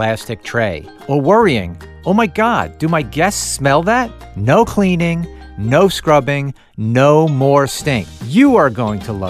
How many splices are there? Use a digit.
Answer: 2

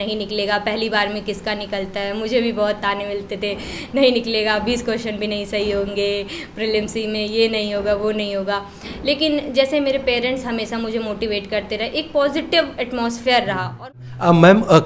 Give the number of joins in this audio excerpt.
1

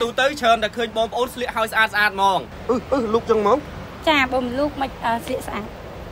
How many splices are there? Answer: 1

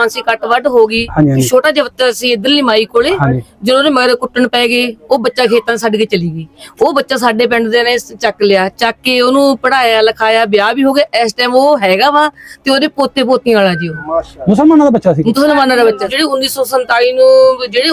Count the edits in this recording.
1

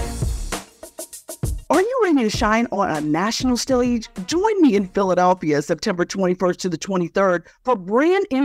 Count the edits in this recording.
1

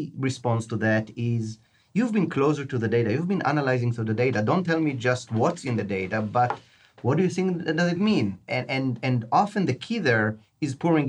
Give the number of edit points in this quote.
0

